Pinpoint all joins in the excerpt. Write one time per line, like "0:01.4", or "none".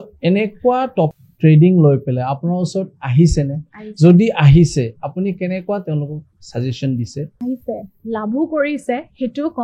0:01.1
0:07.3